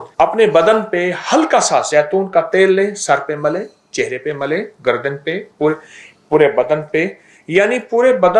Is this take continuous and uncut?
yes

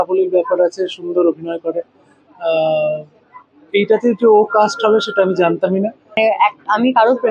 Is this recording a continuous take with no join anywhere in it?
no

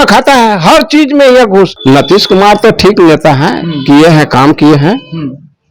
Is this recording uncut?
no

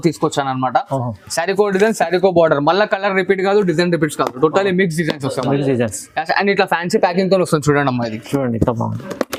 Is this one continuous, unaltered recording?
yes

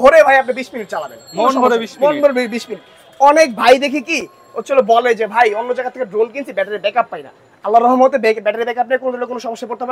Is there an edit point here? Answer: no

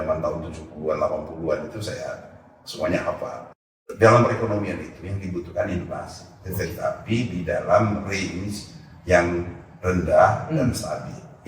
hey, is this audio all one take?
no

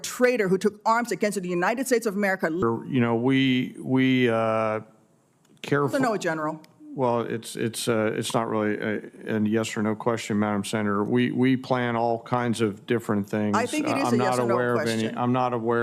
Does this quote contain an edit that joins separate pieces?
yes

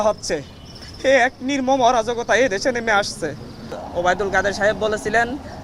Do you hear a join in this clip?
yes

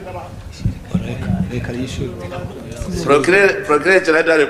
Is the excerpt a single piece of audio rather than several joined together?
yes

